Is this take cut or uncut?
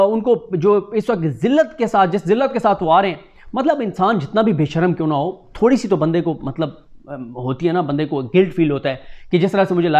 uncut